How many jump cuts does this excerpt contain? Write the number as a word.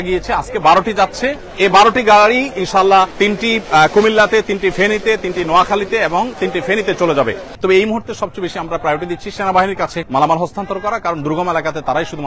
four